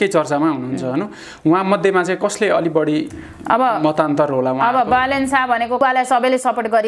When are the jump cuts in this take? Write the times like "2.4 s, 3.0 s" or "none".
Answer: 5.8 s